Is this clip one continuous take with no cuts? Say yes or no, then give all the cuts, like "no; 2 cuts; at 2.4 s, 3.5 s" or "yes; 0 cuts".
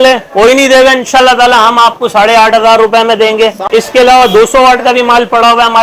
no; 1 cut; at 3.6 s